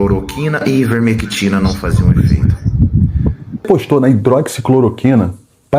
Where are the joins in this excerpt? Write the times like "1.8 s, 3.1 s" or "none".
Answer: 3.6 s

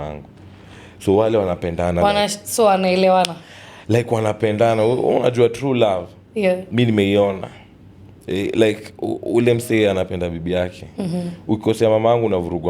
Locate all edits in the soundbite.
none

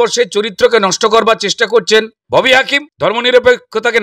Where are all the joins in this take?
2.2 s, 2.9 s

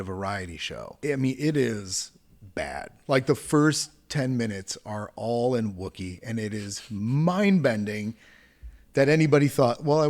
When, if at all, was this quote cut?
1.0 s

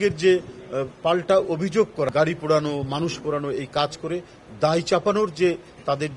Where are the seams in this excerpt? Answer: 2.1 s

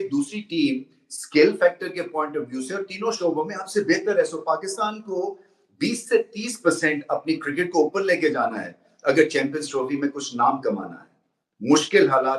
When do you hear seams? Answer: none

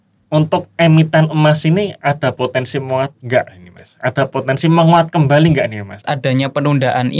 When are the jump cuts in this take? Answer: 6.0 s

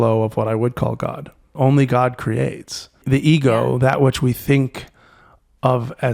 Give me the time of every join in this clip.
1.5 s, 3.0 s

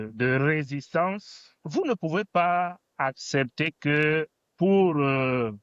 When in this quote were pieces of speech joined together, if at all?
1.6 s

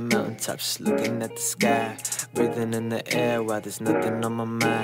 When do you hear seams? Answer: none

